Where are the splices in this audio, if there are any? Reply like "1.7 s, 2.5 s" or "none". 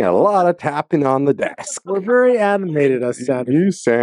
none